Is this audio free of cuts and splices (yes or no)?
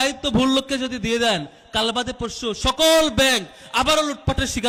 yes